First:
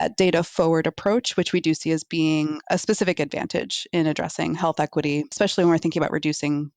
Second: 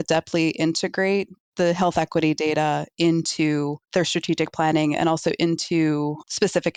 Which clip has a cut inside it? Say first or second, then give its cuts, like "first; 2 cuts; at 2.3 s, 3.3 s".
first; 1 cut; at 5.3 s